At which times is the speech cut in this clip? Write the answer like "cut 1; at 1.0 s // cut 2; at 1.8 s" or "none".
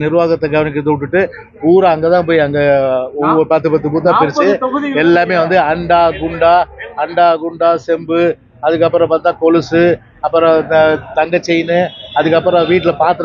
none